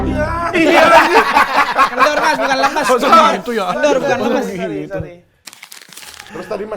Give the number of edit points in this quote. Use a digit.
1